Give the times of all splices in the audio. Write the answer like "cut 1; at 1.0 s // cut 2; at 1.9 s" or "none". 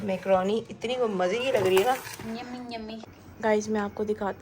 cut 1; at 2.9 s